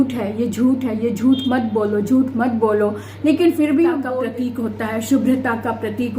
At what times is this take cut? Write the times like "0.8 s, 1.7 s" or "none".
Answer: 4.1 s

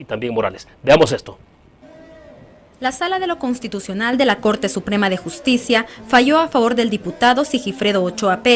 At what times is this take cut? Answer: 6.1 s

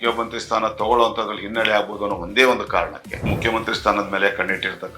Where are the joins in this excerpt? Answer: 3.3 s

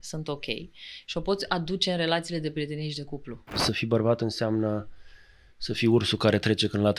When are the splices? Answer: 3.6 s

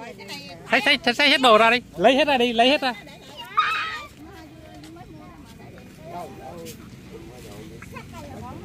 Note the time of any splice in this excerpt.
none

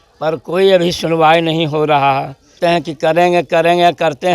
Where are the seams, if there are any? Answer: 2.6 s

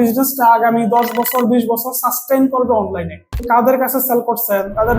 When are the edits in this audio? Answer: 3.4 s

